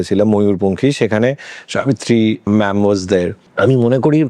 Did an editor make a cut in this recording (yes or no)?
yes